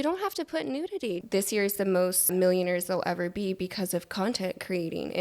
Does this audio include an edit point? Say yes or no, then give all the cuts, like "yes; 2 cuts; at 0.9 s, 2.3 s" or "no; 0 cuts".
yes; 2 cuts; at 1.2 s, 2.3 s